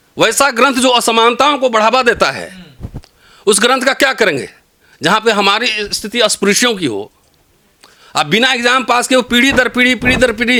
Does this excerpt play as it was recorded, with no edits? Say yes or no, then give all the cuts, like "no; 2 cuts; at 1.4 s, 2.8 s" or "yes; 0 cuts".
yes; 0 cuts